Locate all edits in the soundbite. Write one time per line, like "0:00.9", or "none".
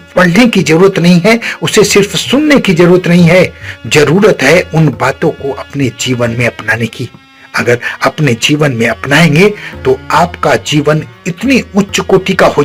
none

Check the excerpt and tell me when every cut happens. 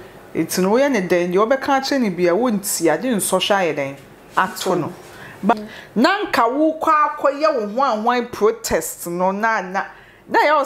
0:05.5

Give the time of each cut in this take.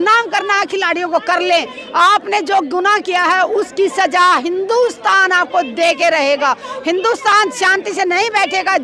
none

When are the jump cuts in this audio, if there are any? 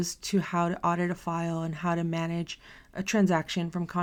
none

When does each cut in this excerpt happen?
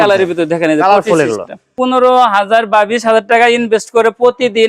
0:01.7

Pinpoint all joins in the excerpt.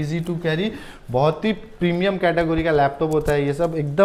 none

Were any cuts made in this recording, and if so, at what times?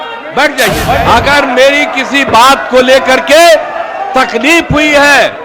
0:01.0

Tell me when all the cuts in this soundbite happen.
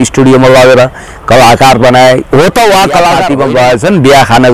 0:03.2

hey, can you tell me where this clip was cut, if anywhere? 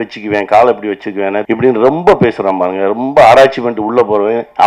0:01.4

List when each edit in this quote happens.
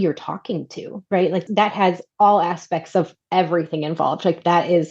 0:01.3

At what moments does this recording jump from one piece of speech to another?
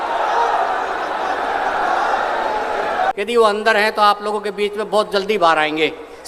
0:03.1

